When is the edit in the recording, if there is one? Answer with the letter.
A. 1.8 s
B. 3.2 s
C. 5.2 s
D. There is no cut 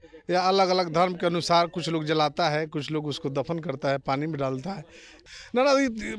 C